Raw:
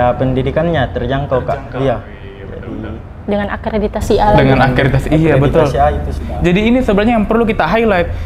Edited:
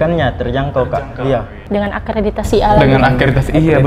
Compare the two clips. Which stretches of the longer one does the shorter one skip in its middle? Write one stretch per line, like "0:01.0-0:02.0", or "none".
0:02.1-0:03.1